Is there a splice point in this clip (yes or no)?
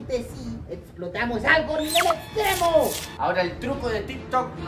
yes